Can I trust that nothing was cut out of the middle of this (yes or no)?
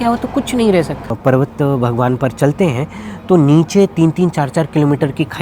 no